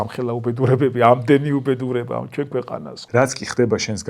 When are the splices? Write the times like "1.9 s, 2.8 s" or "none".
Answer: 2.9 s